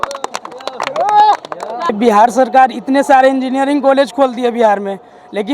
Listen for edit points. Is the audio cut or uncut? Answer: cut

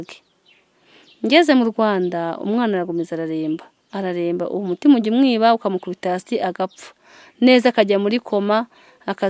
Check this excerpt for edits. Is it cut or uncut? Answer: uncut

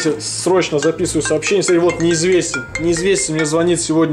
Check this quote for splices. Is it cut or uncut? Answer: uncut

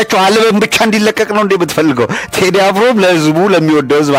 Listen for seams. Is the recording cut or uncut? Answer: uncut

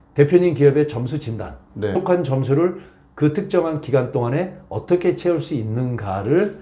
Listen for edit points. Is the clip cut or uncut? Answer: cut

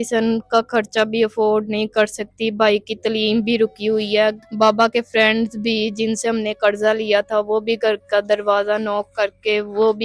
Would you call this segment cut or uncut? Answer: uncut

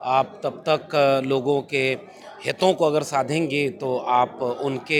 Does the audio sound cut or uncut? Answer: uncut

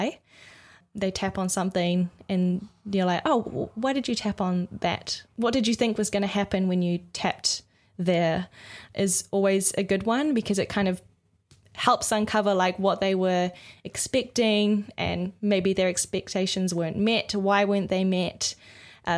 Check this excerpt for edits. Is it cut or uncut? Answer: cut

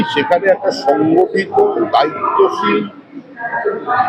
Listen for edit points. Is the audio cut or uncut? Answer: uncut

